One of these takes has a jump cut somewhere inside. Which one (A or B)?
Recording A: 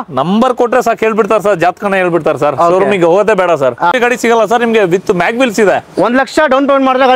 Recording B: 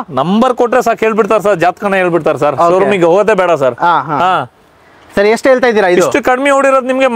A